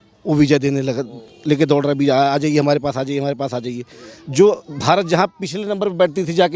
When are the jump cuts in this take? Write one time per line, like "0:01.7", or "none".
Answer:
none